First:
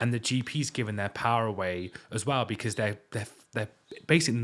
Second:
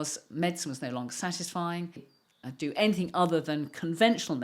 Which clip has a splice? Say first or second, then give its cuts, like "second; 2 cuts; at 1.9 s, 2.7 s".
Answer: second; 1 cut; at 2.1 s